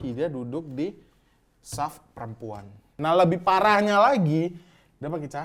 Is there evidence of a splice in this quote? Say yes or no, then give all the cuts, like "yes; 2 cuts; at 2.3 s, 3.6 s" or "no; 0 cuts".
yes; 1 cut; at 2.9 s